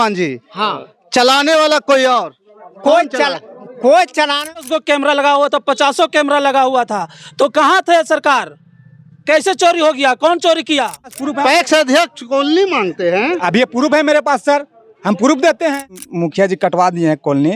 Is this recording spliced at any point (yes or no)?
yes